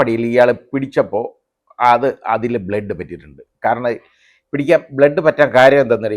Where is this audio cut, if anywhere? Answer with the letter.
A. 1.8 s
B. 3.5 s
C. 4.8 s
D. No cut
D